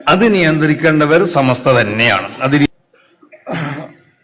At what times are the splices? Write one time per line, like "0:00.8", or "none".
0:02.7